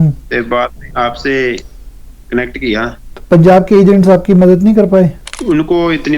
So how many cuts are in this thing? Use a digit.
2